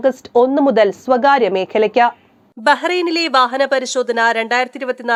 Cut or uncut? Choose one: uncut